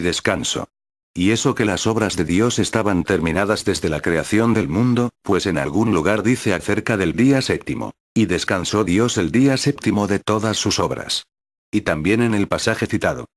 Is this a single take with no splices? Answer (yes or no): no